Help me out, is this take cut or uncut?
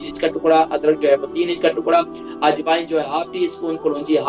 uncut